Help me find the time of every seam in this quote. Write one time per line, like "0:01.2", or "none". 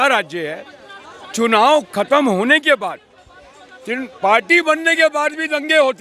none